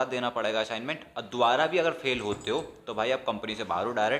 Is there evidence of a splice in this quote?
no; 0 cuts

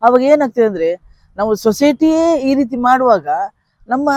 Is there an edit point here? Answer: no; 0 cuts

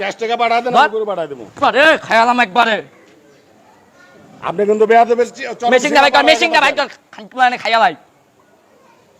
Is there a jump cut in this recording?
no; 0 cuts

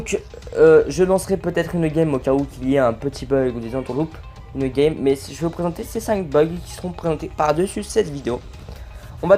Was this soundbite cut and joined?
yes; 1 cut; at 5.1 s

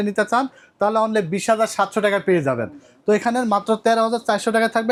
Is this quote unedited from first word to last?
yes; 0 cuts

